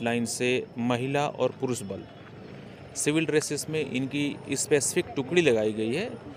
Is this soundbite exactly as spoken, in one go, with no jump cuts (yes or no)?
yes